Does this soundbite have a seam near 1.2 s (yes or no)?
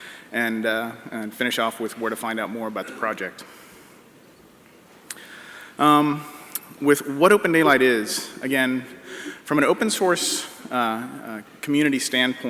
yes